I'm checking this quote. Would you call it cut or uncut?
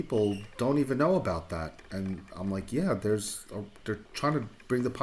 cut